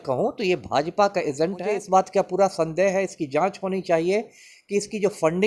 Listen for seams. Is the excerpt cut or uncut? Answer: cut